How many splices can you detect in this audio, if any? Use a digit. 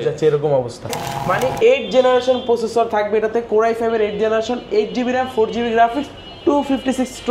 1